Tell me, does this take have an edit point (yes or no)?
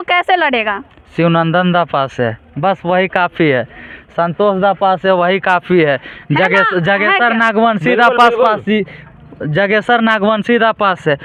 no